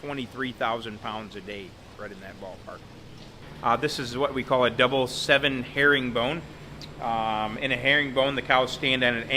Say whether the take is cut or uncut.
cut